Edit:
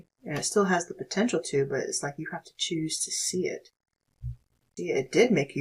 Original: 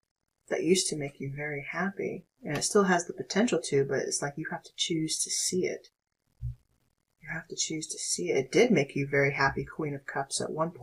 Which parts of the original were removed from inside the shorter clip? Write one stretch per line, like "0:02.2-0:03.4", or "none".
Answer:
0:06.8-0:08.0